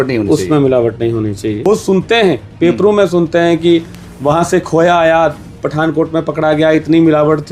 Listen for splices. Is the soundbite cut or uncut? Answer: cut